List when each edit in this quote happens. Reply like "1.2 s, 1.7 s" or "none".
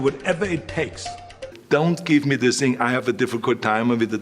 1.5 s